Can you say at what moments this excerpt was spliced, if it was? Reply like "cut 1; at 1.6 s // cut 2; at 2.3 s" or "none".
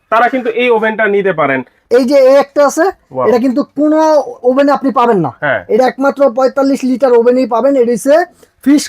cut 1; at 1.7 s

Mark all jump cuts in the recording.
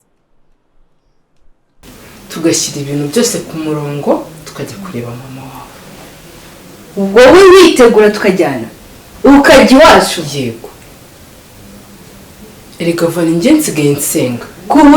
cut 1; at 1.7 s

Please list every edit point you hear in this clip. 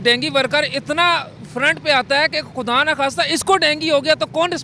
none

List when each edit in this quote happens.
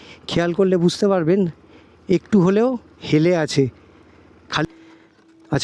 cut 1; at 4.6 s

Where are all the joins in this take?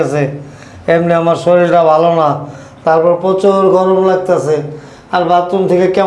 none

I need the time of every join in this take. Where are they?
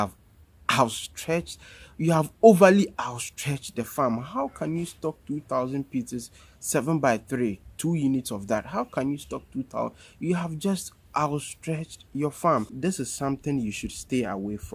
cut 1; at 12.7 s

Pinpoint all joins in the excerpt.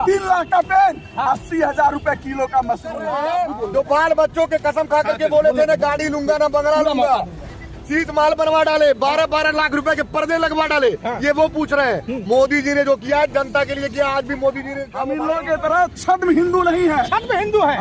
cut 1; at 3.1 s // cut 2; at 14.9 s

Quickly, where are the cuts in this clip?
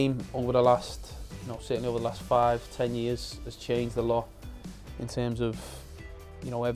none

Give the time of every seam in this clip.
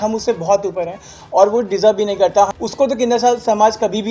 cut 1; at 2.5 s

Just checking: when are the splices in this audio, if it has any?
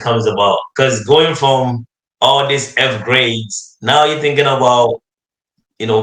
none

